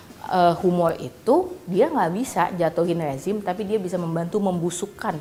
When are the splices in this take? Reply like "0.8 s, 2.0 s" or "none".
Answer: none